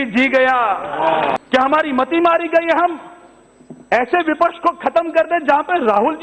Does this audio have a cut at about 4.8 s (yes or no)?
no